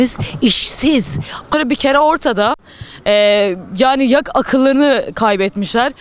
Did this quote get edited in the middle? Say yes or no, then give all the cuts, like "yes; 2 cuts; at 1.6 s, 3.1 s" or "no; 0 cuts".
yes; 1 cut; at 1.5 s